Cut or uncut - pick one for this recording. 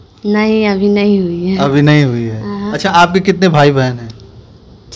uncut